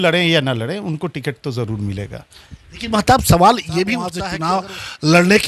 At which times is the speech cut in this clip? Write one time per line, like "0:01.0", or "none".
0:04.3